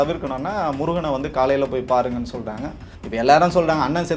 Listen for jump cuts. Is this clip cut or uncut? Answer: cut